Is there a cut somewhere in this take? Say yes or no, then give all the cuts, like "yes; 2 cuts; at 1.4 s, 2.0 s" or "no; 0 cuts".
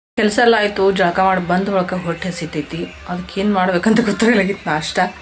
no; 0 cuts